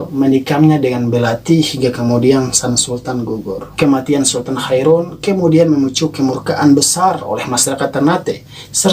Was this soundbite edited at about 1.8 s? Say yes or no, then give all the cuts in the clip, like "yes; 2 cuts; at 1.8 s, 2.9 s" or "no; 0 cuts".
no; 1 cut; at 3.6 s